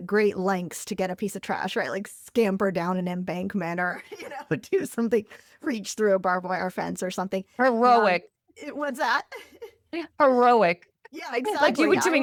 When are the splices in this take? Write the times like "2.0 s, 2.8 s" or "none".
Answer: none